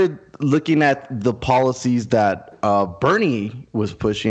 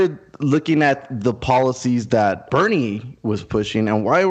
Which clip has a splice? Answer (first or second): second